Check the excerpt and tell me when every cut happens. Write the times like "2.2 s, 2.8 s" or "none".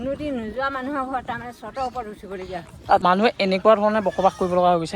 3.0 s